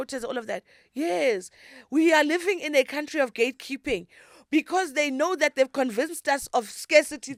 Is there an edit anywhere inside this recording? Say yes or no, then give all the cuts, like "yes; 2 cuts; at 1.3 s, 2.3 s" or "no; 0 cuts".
no; 0 cuts